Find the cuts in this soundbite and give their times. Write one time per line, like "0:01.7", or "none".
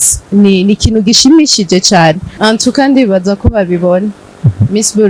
0:02.3